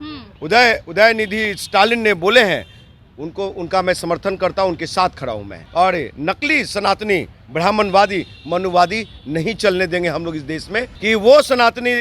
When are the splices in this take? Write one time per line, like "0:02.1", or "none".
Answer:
0:05.5
0:10.9